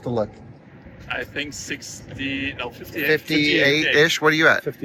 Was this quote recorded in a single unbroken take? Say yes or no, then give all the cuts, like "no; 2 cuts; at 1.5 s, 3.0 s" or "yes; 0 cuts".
yes; 0 cuts